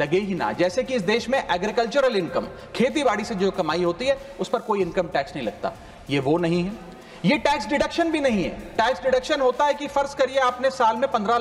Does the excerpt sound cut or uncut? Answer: uncut